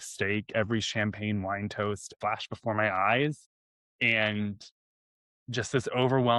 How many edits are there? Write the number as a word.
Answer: one